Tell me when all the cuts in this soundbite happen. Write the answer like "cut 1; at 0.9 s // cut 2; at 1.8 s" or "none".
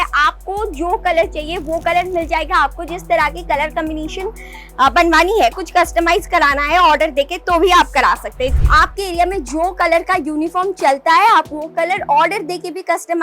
cut 1; at 8.5 s